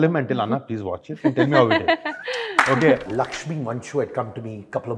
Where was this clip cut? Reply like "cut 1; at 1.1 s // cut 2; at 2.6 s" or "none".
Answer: cut 1; at 3.1 s